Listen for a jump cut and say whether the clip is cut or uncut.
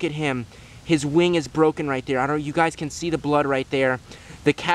uncut